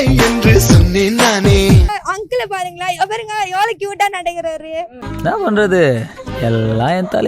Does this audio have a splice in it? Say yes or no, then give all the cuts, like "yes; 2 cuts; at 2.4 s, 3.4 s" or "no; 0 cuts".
yes; 1 cut; at 1.9 s